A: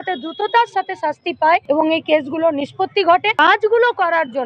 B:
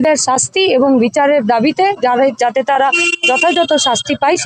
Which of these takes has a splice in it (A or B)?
A